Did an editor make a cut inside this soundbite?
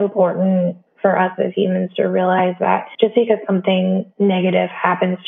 yes; 3 cuts; at 0.9 s, 2.9 s, 4.1 s

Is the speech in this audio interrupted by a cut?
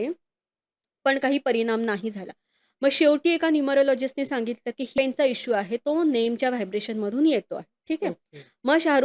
yes; 1 cut; at 4.9 s

